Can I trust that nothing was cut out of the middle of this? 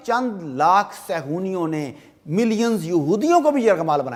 yes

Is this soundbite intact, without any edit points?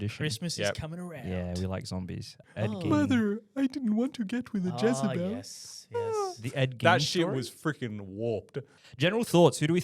no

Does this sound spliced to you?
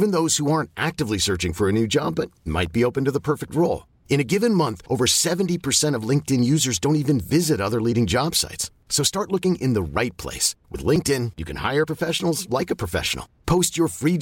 no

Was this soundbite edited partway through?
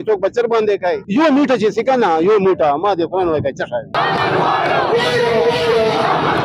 yes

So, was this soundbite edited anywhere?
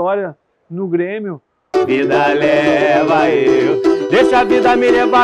yes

